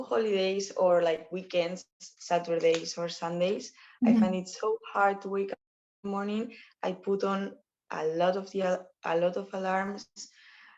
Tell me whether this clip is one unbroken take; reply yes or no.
yes